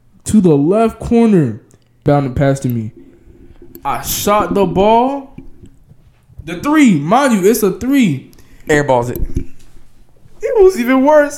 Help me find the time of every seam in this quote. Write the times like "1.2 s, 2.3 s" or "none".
2.0 s